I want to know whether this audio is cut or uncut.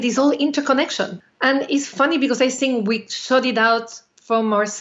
cut